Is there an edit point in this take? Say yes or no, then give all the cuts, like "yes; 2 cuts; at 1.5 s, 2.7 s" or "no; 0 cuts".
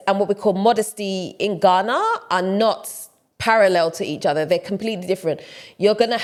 no; 0 cuts